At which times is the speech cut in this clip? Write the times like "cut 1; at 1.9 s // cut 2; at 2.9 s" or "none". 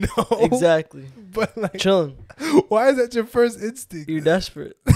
cut 1; at 4.0 s